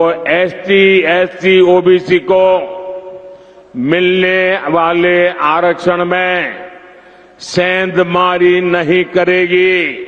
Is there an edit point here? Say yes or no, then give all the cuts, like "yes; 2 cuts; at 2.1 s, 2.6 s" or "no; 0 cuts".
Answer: no; 0 cuts